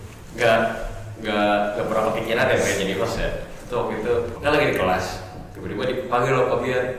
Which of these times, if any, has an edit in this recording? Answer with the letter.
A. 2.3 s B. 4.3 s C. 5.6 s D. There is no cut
B